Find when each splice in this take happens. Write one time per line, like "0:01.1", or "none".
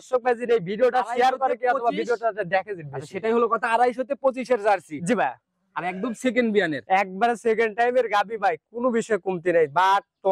none